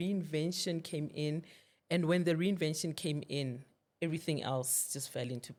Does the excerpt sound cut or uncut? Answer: uncut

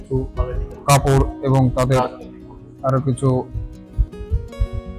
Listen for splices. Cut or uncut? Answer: uncut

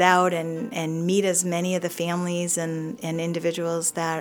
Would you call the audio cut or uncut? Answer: uncut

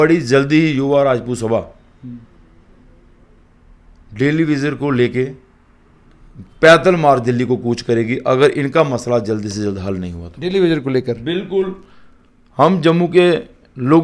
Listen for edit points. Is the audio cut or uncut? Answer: uncut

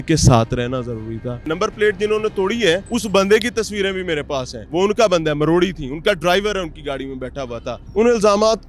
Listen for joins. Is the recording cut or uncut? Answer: cut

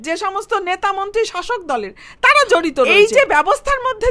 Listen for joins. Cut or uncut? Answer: cut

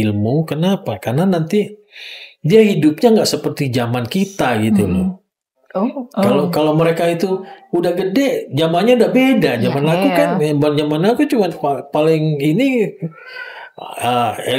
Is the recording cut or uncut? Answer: uncut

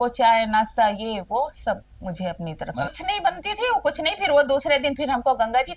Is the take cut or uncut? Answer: cut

